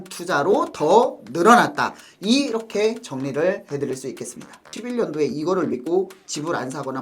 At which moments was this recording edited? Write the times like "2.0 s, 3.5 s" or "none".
4.7 s